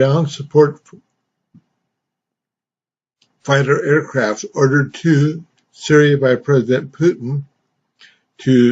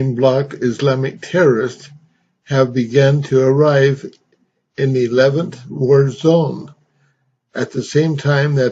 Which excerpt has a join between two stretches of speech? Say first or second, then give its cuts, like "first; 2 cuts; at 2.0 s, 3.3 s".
first; 1 cut; at 5.3 s